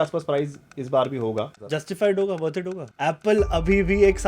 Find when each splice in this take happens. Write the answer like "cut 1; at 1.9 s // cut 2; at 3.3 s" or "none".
cut 1; at 1.6 s // cut 2; at 2.9 s